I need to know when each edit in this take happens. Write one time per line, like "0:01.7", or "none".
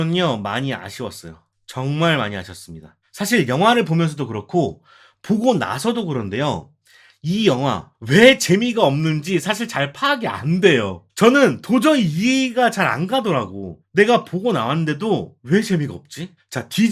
none

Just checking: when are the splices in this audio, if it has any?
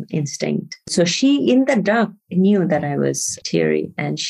0:03.3

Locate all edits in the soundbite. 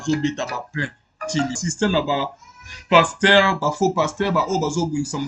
0:01.6

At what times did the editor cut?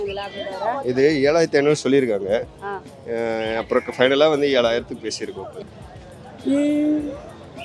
0:05.6

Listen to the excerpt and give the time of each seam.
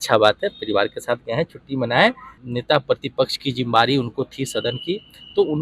0:02.3

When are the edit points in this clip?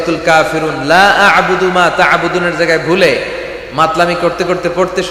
none

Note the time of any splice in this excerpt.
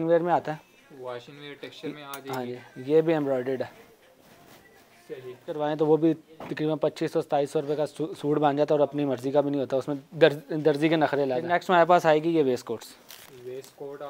0:05.6
0:11.4

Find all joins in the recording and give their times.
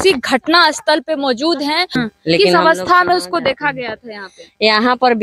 0:02.0

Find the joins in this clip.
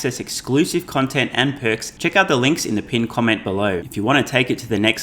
0:01.9
0:03.8

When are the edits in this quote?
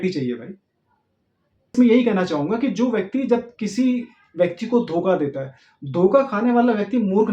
0:01.7

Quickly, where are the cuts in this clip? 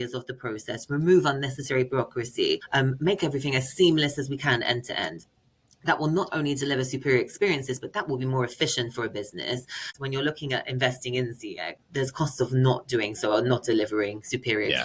0:02.6
0:09.9
0:11.8

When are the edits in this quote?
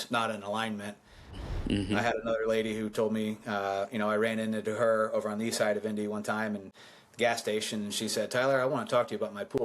0:01.3

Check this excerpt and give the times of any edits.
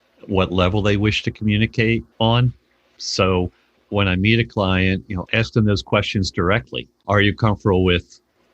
0:02.1
0:06.9

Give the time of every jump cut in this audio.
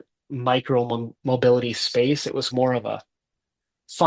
0:02.5

